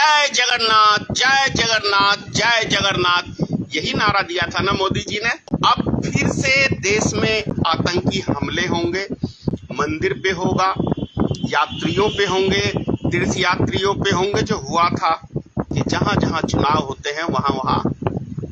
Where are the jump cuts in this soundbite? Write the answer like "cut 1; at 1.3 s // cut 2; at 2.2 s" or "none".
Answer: cut 1; at 5.5 s // cut 2; at 15.7 s